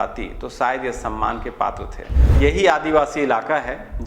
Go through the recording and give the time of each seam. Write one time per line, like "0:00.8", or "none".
0:02.3